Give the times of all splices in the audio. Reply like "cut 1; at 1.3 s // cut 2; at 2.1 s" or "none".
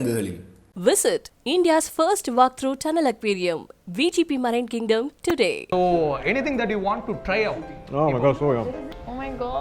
cut 1; at 5.5 s // cut 2; at 8.6 s